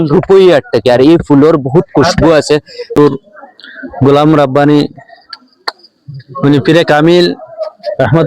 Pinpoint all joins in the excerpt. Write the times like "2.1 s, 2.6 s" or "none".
3.0 s